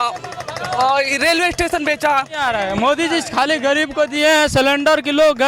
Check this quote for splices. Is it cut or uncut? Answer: cut